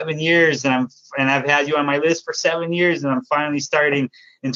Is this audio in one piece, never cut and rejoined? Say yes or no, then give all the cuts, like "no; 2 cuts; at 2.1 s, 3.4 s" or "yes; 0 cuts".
yes; 0 cuts